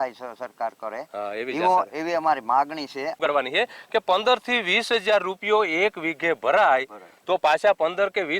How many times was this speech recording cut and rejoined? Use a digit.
1